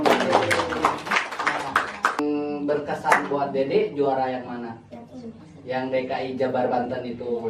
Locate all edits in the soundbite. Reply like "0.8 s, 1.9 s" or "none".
2.2 s